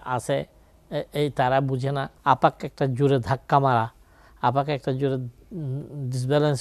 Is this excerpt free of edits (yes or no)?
no